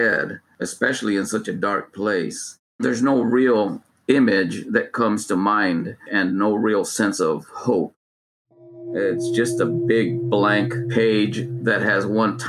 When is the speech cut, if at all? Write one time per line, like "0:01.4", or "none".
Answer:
none